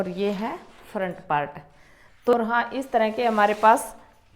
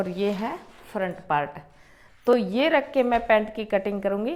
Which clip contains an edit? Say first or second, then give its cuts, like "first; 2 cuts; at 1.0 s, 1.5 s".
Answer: first; 1 cut; at 2.3 s